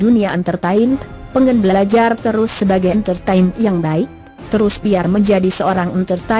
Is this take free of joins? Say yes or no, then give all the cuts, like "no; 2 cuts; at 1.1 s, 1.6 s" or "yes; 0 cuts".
yes; 0 cuts